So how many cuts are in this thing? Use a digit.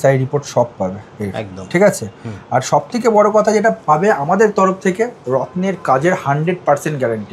0